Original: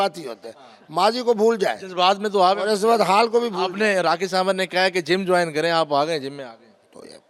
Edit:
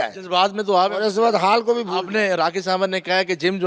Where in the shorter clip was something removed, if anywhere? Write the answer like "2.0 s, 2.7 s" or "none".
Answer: none